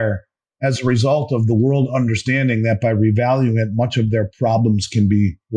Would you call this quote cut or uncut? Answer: uncut